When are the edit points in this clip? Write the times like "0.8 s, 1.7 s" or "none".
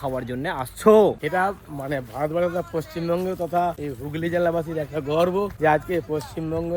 none